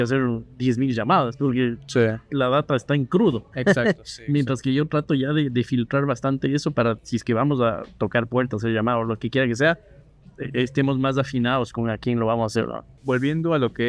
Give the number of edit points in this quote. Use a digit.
1